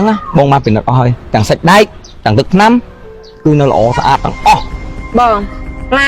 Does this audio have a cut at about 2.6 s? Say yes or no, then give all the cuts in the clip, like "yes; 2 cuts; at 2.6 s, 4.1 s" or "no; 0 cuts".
no; 1 cut; at 4.8 s